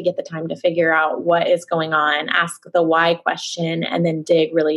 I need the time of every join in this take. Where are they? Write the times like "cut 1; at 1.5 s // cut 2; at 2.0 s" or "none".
none